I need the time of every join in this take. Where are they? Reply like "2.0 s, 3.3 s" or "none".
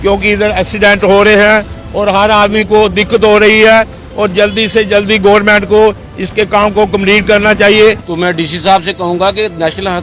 8.1 s